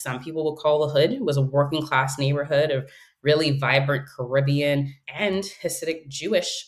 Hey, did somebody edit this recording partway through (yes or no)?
yes